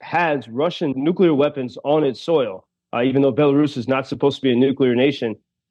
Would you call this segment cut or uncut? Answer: cut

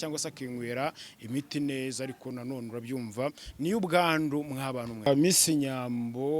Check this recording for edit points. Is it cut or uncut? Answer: cut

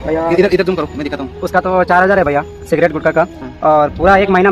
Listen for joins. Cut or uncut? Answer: cut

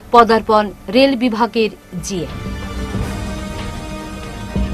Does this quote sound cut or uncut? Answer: uncut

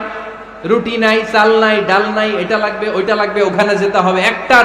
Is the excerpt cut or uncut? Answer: uncut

